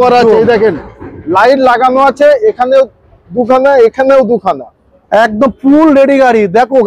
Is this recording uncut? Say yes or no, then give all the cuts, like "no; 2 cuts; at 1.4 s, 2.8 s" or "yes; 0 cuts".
yes; 0 cuts